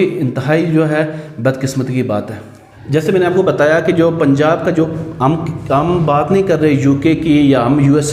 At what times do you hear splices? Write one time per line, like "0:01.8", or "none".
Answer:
none